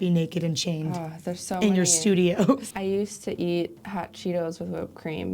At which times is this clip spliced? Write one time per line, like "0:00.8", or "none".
0:02.7
0:03.8